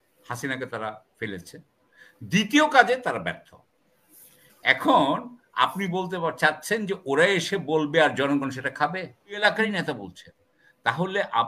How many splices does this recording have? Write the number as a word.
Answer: one